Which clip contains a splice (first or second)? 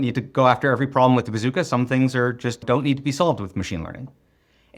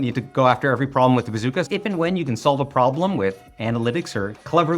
second